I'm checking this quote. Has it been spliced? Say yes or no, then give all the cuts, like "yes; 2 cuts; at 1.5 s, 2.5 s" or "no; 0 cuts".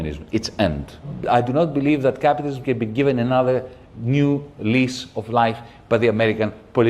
yes; 1 cut; at 1.1 s